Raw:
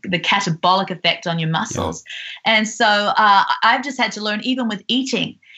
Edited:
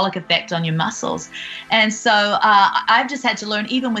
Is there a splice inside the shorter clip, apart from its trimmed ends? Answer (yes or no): no